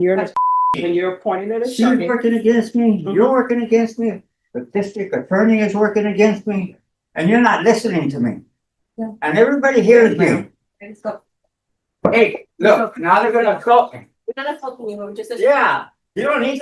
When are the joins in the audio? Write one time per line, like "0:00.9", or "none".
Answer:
none